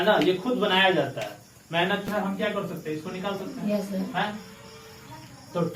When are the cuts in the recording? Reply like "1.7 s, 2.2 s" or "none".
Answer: 2.1 s